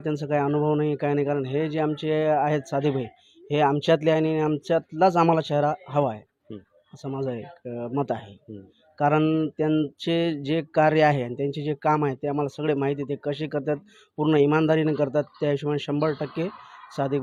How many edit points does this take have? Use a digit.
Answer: 0